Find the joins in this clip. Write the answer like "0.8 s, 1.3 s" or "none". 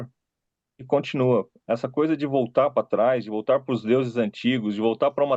none